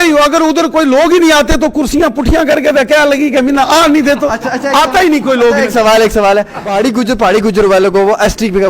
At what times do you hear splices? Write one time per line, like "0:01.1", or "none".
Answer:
0:06.6